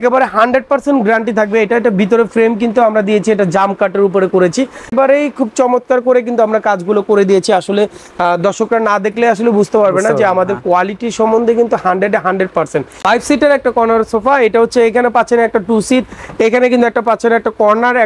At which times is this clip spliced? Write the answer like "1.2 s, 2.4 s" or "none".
4.9 s, 12.8 s